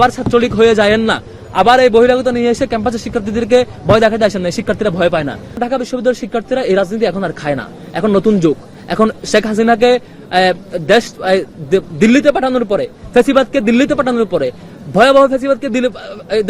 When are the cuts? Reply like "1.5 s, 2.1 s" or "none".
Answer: 5.5 s